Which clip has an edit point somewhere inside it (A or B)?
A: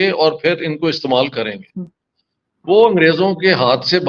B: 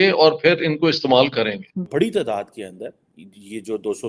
B